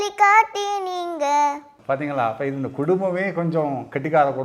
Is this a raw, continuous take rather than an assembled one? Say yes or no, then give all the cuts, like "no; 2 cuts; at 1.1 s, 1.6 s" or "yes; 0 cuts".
no; 1 cut; at 1.7 s